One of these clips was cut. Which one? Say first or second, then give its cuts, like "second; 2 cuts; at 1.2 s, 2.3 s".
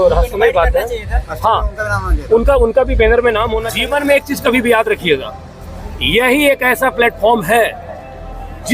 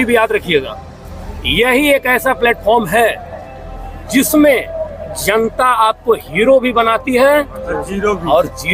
first; 1 cut; at 3.6 s